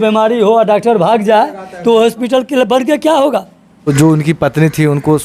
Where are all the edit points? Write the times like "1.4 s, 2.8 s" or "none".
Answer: 3.9 s